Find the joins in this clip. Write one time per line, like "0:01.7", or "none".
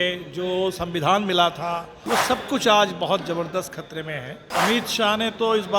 0:01.9
0:04.5